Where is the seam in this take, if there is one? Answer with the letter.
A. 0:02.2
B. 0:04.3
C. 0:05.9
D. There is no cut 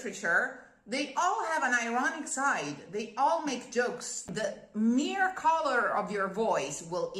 B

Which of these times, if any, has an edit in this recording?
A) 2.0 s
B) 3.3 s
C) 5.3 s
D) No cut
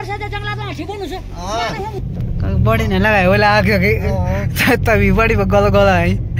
A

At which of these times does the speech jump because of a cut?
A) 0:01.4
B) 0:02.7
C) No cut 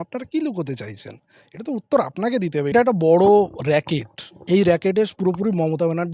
B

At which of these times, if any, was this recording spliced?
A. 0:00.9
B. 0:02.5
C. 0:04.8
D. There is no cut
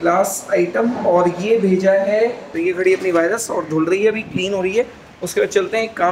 B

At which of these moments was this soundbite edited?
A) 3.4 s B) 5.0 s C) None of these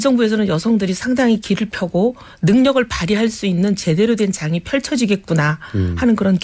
A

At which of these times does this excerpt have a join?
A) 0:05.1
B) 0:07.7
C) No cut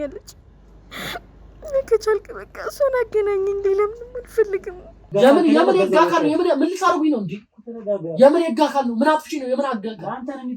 A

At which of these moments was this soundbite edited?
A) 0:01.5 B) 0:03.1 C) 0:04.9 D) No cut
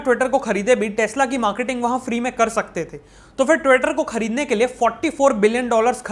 D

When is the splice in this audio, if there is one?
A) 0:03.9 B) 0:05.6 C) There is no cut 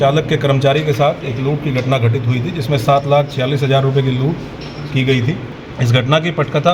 B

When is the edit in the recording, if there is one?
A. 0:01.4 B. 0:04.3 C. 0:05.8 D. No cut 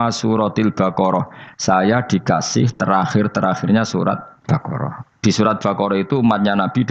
B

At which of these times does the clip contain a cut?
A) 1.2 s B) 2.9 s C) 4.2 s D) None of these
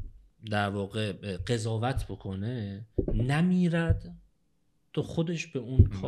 D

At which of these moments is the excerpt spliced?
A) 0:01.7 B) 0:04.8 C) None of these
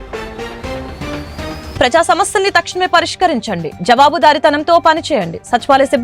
A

